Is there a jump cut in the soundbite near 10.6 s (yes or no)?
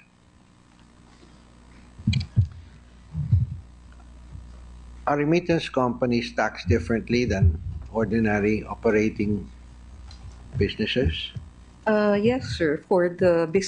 no